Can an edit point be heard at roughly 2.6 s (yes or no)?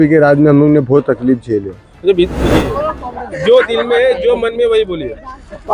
yes